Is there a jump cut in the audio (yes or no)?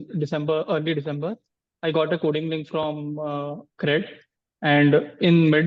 no